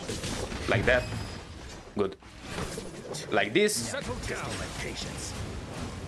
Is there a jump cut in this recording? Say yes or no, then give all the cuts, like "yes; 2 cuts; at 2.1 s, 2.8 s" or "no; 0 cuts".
no; 0 cuts